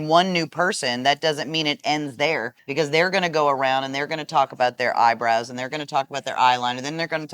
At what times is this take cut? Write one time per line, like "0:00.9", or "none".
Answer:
0:02.6